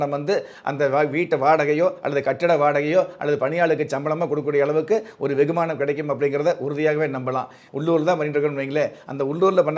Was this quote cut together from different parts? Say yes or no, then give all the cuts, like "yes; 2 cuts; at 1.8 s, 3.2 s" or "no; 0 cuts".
yes; 1 cut; at 7.6 s